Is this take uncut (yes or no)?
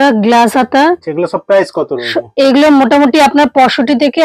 no